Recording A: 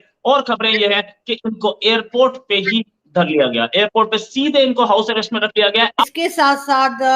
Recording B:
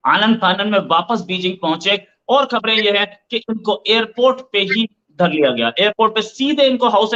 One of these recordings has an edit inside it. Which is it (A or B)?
A